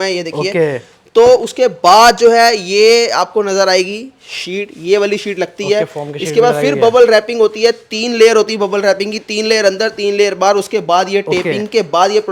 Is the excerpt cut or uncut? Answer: uncut